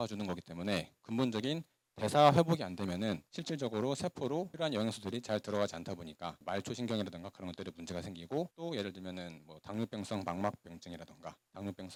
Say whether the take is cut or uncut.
uncut